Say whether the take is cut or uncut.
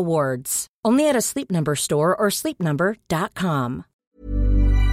cut